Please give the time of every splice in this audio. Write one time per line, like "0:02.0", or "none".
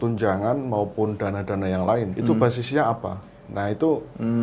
0:02.1

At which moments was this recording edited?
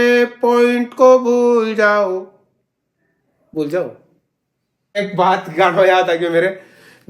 0:05.0

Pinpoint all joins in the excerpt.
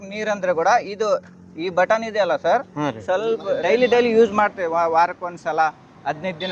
0:03.5

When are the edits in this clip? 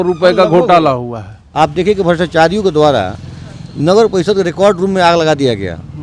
0:01.5

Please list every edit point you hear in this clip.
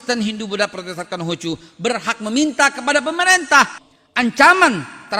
0:03.9

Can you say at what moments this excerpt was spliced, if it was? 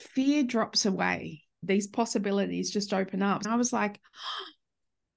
0:01.6
0:03.5

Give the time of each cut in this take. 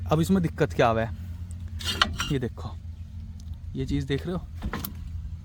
none

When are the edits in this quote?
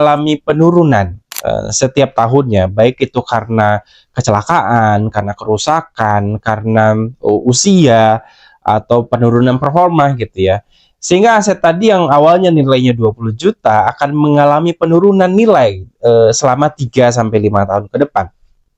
none

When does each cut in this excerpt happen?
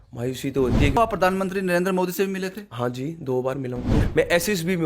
0:01.0
0:04.0

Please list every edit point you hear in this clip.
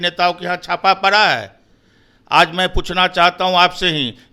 none

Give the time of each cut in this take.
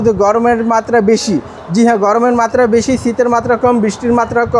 none

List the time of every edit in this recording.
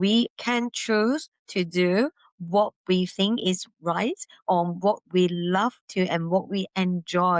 none

